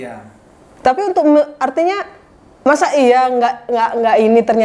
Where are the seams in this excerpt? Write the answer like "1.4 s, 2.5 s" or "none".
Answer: none